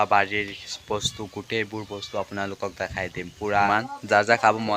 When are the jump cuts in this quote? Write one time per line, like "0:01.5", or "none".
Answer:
0:03.7

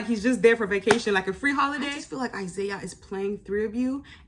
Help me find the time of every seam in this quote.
0:02.0

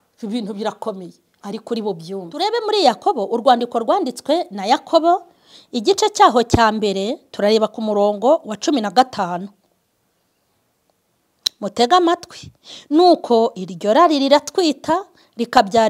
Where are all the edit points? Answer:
0:02.3

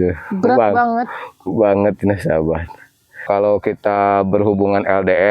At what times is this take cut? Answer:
0:03.2

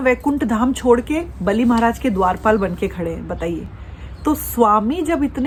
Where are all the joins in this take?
none

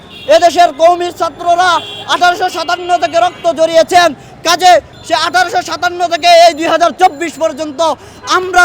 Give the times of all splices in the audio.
0:04.9

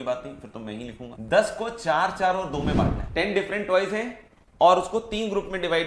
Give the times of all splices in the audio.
0:01.1
0:03.0

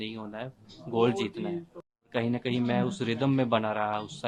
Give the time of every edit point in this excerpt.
0:02.1

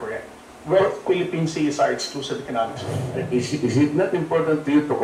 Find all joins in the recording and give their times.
0:03.2

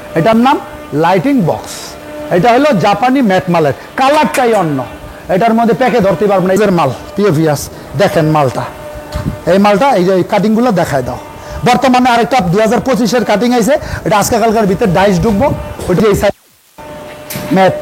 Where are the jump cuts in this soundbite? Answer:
0:06.6
0:16.0

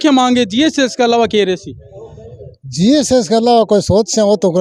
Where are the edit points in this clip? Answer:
none

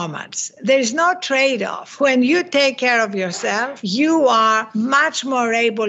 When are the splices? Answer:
0:01.8
0:03.8
0:04.7

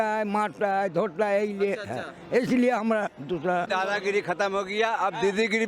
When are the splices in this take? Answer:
0:03.7

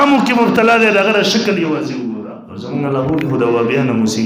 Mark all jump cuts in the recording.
0:02.2

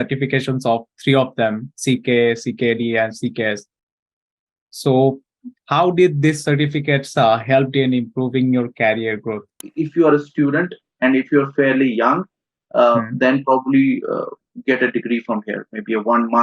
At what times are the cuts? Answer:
0:09.6

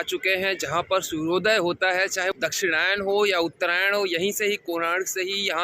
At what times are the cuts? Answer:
0:02.3

